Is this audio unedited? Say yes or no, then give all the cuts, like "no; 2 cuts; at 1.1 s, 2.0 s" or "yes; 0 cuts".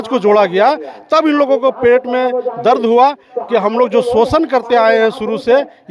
yes; 0 cuts